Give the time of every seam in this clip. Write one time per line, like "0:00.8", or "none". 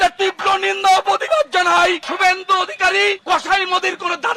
0:02.1